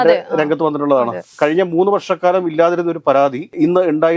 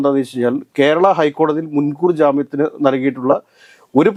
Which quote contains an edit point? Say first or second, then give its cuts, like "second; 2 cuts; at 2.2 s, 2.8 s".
first; 1 cut; at 1.3 s